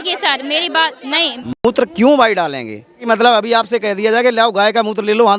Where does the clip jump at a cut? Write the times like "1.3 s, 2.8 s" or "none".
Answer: 1.4 s, 3.0 s